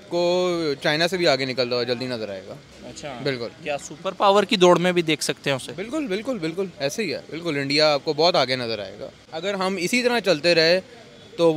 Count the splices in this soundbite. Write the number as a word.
one